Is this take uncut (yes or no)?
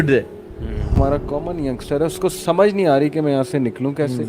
no